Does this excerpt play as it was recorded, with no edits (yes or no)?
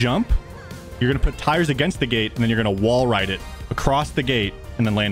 yes